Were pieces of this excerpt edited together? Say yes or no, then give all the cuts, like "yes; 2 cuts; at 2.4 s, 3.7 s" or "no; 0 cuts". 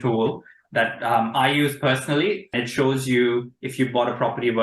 yes; 1 cut; at 2.5 s